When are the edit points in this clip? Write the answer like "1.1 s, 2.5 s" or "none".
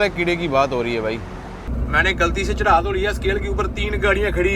1.6 s